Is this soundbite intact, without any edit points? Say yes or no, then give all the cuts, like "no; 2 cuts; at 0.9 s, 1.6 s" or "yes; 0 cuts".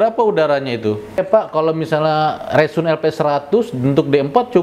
no; 1 cut; at 1.2 s